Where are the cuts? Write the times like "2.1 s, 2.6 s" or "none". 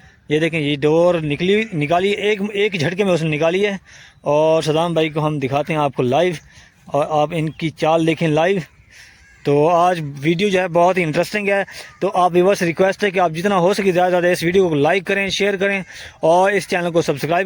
none

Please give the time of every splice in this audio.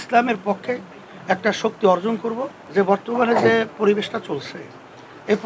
2.5 s

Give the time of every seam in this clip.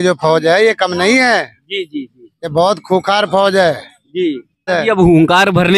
2.4 s, 4.7 s

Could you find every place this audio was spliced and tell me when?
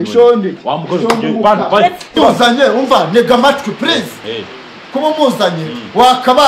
2.1 s

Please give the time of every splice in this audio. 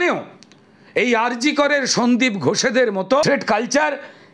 3.2 s

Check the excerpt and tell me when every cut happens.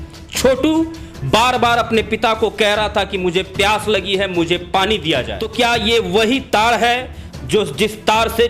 5.4 s

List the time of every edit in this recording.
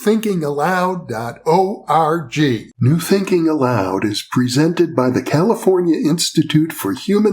2.7 s

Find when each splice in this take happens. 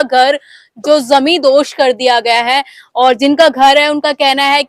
none

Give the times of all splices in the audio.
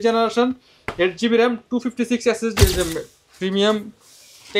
2.6 s

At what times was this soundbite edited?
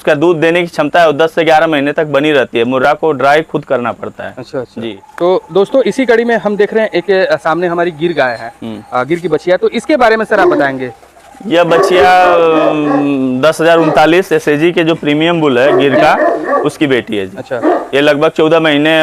none

